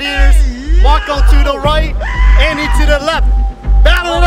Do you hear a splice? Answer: no; 0 cuts

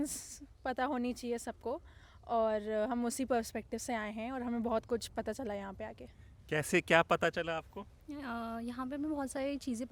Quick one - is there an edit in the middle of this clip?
no; 0 cuts

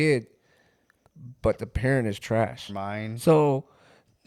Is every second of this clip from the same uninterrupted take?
no; 1 cut; at 2.7 s

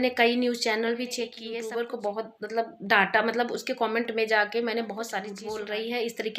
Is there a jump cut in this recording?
yes; 2 cuts; at 1.4 s, 5.4 s

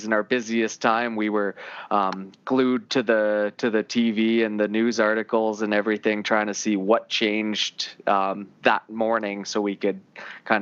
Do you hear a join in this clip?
no; 0 cuts

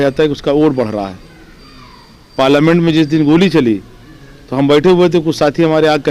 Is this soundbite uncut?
yes; 0 cuts

